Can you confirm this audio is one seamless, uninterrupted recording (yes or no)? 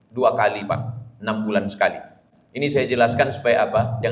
no